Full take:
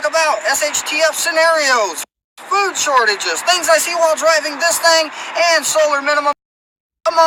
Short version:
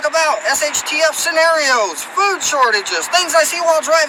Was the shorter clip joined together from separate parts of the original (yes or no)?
yes